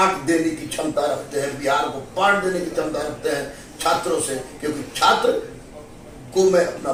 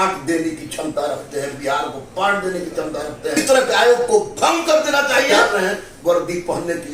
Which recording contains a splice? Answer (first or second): second